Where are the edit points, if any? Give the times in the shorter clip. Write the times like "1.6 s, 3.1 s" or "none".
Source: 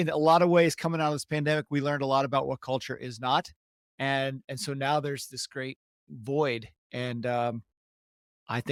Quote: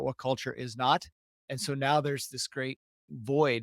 1.4 s

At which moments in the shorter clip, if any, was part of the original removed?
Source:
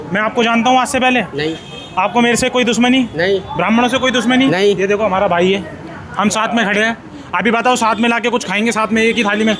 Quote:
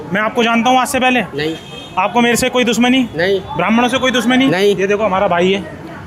none

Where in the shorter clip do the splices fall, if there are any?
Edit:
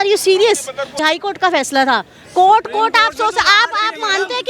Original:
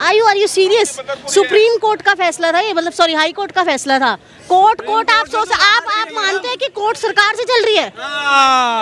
1.0 s

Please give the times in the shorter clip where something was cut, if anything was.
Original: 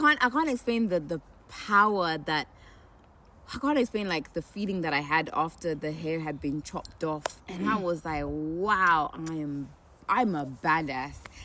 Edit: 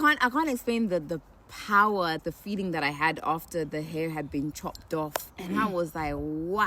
2.2 s

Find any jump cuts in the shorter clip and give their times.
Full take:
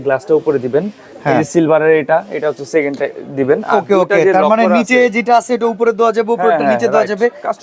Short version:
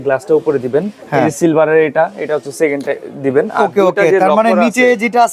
1.0 s

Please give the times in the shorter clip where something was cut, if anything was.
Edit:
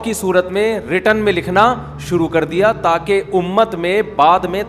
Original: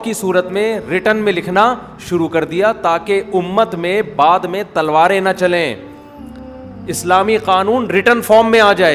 none

